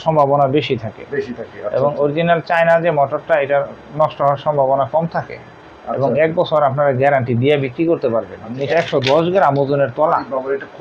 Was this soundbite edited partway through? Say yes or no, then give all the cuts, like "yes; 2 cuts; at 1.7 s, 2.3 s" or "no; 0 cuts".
yes; 1 cut; at 8.7 s